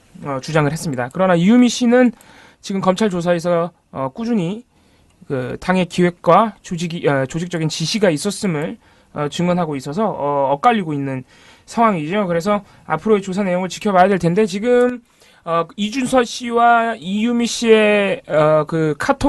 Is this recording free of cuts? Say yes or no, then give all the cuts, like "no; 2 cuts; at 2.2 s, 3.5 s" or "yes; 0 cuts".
no; 1 cut; at 6.3 s